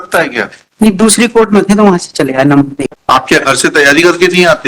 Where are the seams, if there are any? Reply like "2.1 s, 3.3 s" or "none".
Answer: 2.8 s